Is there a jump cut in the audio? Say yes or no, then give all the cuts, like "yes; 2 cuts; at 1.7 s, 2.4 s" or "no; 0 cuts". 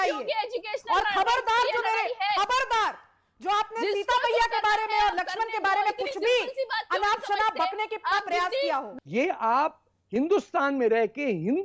yes; 1 cut; at 8.9 s